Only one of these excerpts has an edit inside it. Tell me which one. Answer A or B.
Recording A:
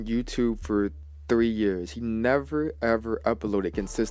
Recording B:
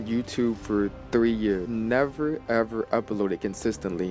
B